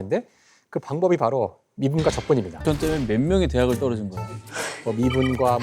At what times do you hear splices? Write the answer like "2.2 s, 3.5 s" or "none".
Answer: 2.6 s